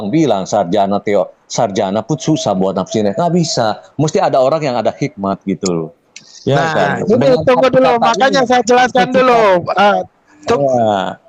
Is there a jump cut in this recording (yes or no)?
no